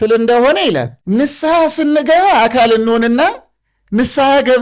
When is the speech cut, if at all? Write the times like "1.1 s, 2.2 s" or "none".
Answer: 0.9 s